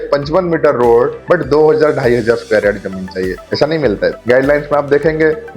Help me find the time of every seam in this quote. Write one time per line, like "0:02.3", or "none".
none